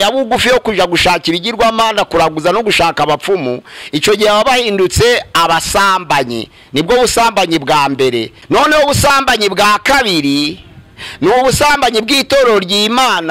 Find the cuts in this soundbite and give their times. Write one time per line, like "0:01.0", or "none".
0:08.3